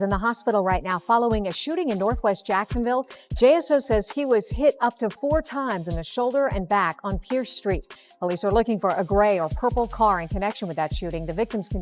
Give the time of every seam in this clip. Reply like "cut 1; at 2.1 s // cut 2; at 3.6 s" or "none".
none